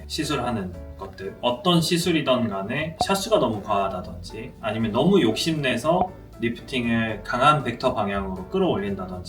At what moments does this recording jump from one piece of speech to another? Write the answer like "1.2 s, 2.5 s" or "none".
none

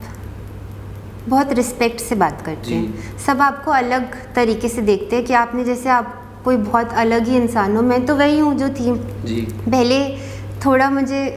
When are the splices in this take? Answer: none

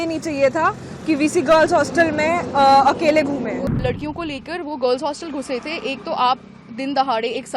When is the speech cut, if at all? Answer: 3.7 s

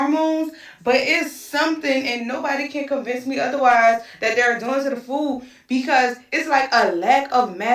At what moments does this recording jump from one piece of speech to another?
6.1 s

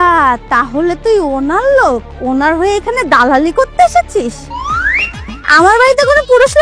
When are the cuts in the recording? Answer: none

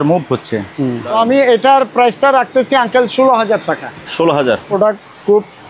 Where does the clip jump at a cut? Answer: 1.1 s, 4.7 s

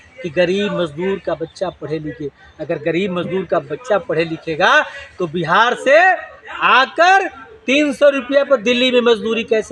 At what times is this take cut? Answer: none

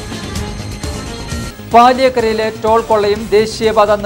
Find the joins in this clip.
none

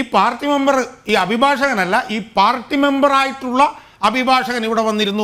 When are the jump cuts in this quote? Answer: none

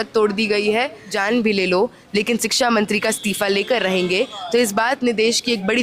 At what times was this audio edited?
1.1 s

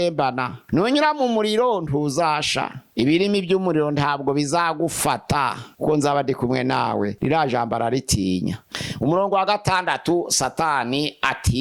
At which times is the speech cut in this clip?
5.7 s, 7.1 s, 8.7 s

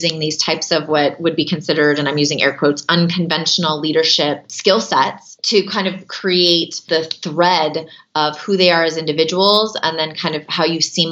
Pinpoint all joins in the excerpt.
4.5 s, 5.3 s, 6.8 s

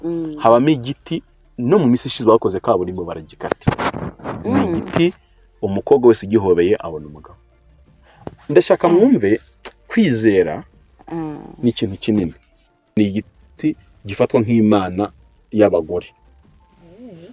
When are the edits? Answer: 12.9 s

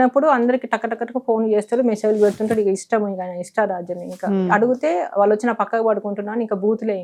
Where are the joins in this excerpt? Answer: none

